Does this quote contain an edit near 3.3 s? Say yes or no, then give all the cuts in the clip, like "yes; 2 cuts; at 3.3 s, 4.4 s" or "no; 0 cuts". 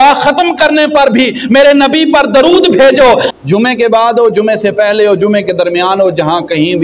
yes; 1 cut; at 3.3 s